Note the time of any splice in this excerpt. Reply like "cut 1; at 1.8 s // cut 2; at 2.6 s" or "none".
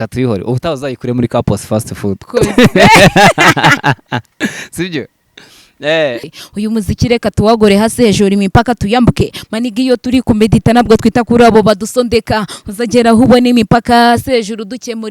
cut 1; at 6.2 s